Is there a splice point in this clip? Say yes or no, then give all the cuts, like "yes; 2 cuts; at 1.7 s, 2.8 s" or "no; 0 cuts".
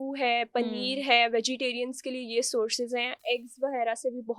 no; 0 cuts